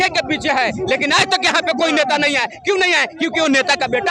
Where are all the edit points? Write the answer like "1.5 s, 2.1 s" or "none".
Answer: none